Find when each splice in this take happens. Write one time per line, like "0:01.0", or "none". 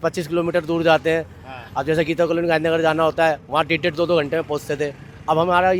none

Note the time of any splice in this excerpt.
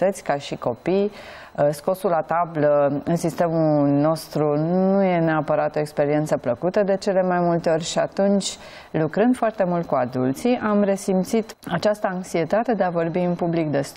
0:11.6

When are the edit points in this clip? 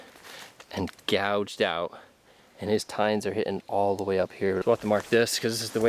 0:04.6

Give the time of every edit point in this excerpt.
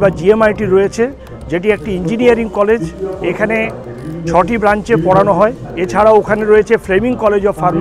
none

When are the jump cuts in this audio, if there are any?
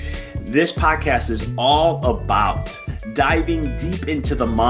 none

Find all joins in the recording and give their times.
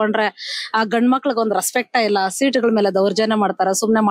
none

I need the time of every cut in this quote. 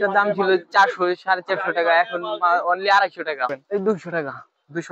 0:03.5

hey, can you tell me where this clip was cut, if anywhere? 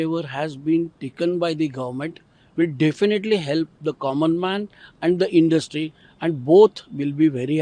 none

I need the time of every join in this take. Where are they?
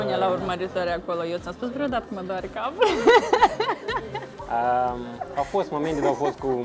none

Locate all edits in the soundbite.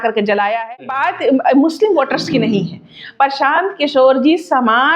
0:01.0

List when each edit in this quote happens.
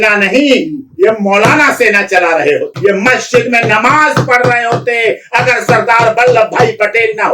0:02.7

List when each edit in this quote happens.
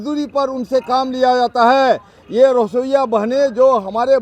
none

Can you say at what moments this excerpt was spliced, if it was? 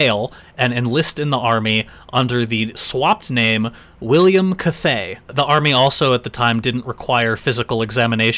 0:05.3

